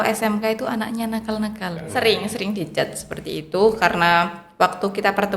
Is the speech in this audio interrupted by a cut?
yes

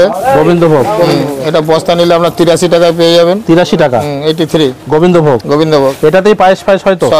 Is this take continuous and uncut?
yes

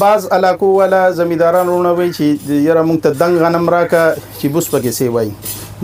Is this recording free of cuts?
yes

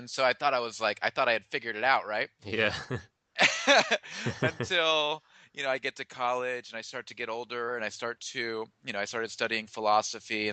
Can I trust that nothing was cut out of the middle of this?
yes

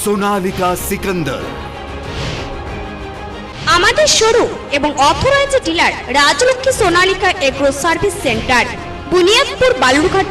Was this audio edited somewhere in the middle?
yes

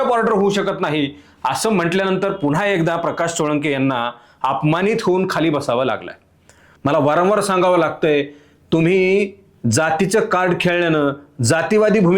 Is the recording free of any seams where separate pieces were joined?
no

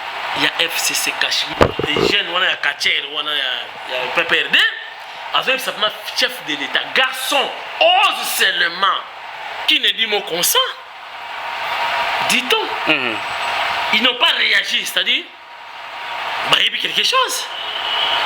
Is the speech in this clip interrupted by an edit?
yes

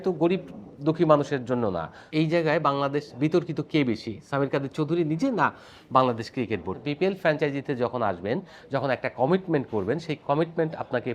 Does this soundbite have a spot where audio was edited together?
yes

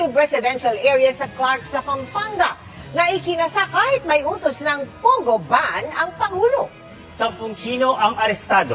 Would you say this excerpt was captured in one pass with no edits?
no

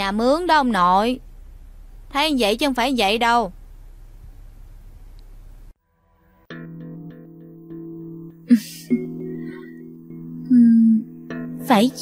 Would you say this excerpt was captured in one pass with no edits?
yes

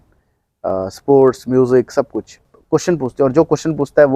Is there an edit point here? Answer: yes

